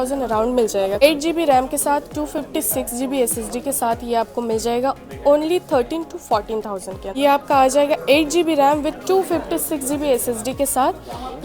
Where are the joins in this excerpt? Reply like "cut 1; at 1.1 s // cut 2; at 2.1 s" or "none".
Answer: cut 1; at 1.0 s // cut 2; at 7.1 s